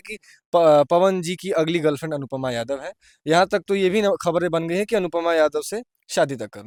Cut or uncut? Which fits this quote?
uncut